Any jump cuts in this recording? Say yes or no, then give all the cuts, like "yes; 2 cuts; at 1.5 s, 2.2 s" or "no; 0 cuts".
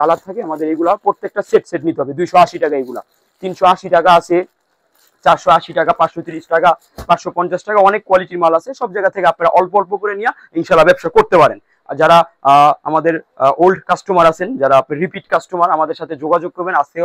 no; 0 cuts